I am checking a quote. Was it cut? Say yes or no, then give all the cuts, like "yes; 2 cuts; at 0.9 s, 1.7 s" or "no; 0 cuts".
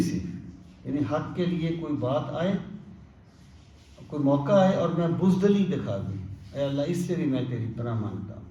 no; 0 cuts